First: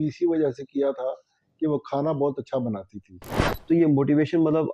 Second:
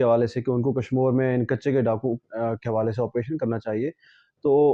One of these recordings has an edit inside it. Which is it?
first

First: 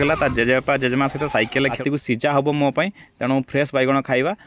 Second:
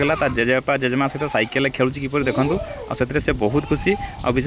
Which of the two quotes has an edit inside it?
first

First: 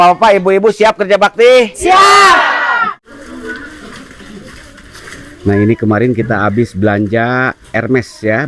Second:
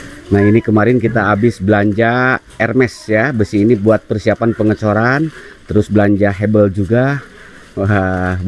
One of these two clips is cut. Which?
first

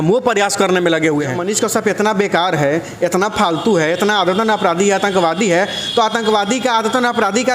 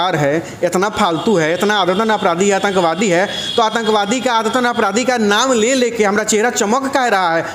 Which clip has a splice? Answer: first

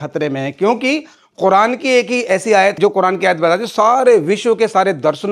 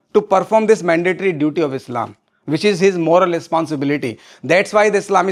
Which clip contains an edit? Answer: first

